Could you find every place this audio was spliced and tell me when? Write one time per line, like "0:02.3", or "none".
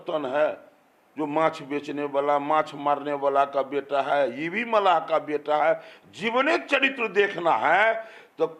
none